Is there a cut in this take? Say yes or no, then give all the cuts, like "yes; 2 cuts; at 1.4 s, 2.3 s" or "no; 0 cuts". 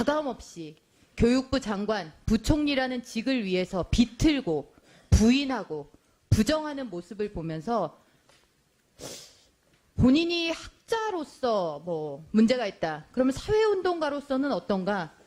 yes; 1 cut; at 10.3 s